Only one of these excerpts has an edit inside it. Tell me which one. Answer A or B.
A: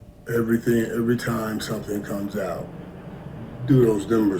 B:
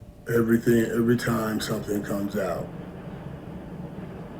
A